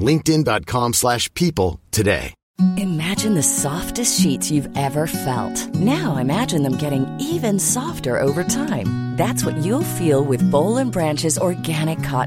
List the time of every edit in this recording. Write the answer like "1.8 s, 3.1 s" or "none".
2.4 s